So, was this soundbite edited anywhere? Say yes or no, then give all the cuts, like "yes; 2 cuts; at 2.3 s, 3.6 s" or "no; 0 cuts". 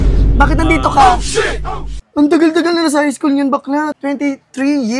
yes; 1 cut; at 1.9 s